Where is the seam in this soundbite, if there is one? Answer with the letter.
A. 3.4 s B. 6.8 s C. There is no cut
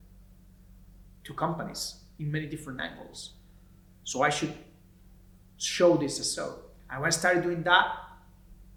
C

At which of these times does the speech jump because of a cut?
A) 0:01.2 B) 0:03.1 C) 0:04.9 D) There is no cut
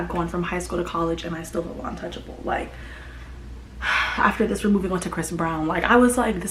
D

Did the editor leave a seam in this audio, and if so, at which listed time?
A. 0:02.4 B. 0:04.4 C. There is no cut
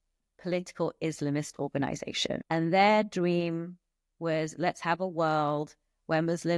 A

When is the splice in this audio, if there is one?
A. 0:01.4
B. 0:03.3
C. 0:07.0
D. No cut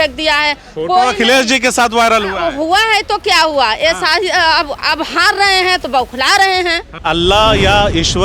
C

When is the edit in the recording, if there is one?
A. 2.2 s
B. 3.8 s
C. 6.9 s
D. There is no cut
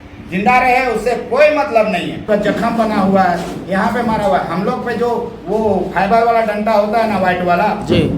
A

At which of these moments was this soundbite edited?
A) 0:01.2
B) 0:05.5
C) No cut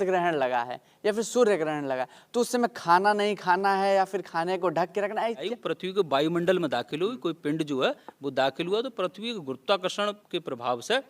B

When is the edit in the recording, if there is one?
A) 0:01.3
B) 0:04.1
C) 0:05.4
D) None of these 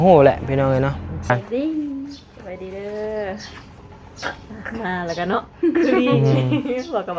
A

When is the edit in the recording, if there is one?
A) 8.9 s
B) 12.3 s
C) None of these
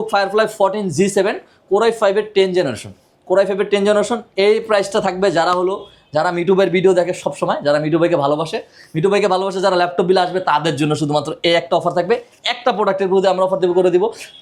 C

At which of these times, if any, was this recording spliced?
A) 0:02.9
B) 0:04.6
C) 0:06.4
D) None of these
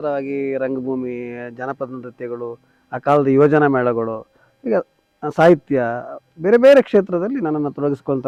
D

